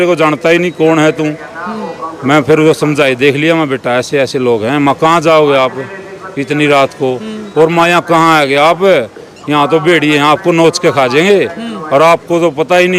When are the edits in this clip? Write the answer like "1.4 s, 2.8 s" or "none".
none